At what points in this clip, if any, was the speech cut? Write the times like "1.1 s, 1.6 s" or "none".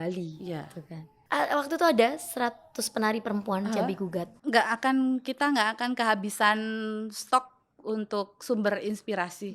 1.1 s, 4.3 s